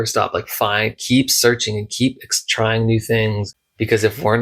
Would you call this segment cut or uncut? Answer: cut